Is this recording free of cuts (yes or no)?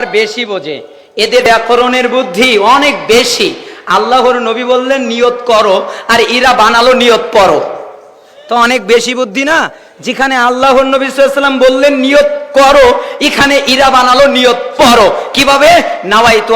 no